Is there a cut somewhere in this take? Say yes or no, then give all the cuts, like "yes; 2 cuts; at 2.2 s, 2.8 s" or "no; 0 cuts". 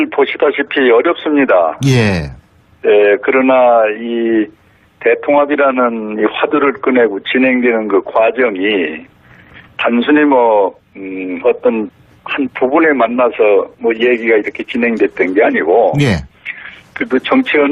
no; 0 cuts